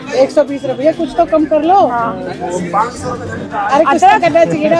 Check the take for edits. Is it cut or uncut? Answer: uncut